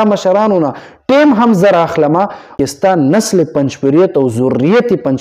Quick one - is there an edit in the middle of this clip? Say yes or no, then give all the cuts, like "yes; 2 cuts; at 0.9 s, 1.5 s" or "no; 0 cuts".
yes; 1 cut; at 2.5 s